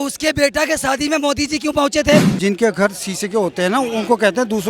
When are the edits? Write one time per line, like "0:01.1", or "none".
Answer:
0:02.3